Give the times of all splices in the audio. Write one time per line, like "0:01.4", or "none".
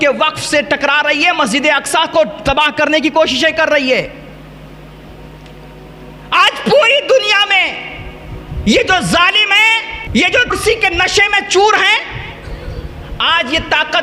none